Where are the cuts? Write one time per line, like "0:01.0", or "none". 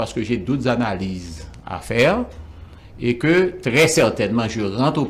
none